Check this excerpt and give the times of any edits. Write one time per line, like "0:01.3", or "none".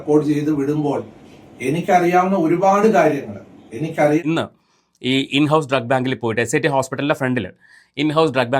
0:04.2